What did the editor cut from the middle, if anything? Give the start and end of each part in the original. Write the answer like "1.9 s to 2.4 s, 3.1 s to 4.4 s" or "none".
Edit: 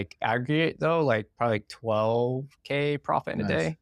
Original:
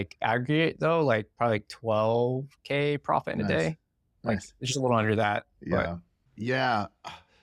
none